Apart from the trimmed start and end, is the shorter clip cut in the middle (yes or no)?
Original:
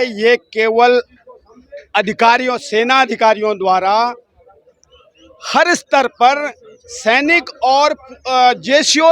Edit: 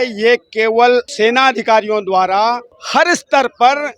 yes